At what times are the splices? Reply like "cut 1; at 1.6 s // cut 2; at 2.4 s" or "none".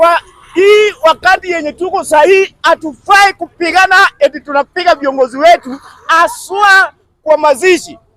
none